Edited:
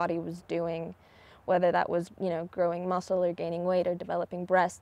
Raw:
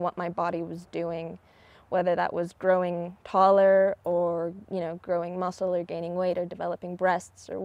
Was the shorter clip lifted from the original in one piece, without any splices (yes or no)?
no